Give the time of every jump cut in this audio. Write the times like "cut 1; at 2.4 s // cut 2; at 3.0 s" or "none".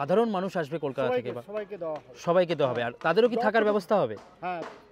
none